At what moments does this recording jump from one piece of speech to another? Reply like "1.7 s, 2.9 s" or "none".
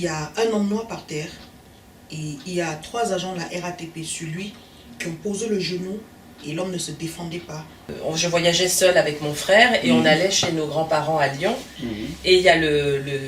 7.9 s